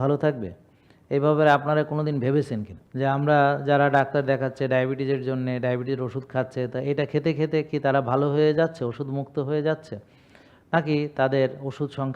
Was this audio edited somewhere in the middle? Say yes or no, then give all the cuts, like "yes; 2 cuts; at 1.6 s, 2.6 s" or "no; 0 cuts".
yes; 1 cut; at 2.8 s